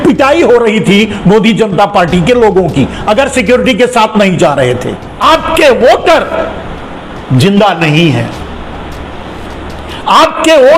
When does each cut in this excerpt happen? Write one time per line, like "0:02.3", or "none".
0:05.0